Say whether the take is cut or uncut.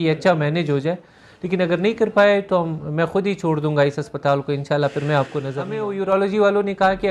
cut